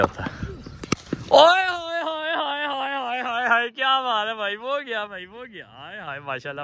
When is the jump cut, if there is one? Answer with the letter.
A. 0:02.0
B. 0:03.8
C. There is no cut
C